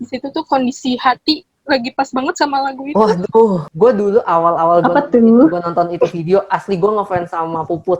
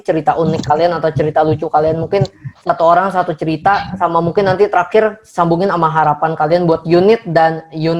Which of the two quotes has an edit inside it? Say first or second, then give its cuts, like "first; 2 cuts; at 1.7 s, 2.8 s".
first; 1 cut; at 3.7 s